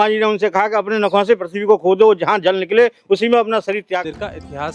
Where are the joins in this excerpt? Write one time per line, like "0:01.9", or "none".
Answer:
none